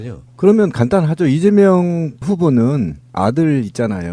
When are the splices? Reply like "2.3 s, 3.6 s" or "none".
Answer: 2.1 s